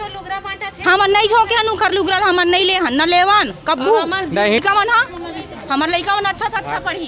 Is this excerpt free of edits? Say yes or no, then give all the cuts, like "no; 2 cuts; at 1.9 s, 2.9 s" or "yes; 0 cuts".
no; 1 cut; at 4.6 s